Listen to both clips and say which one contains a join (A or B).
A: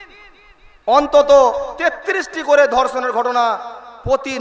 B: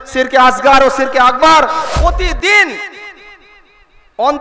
B